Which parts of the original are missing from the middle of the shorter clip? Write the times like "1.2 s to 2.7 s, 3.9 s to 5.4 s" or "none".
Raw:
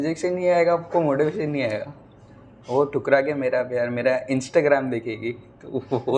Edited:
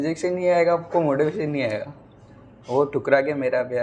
none